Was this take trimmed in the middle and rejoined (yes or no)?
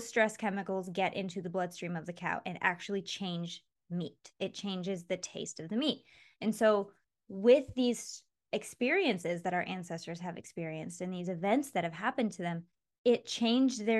no